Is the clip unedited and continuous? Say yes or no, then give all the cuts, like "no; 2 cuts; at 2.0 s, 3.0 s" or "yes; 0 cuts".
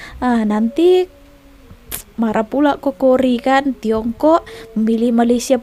yes; 0 cuts